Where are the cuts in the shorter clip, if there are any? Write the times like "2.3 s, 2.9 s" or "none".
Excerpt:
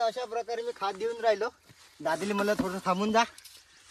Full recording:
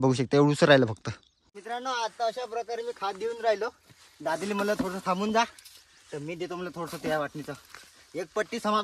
none